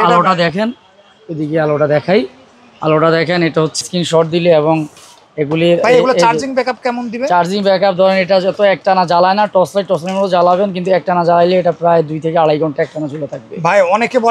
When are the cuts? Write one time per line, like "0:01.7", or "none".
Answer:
0:03.8